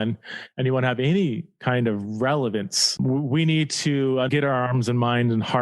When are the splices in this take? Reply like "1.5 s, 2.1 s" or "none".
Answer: 3.0 s, 4.3 s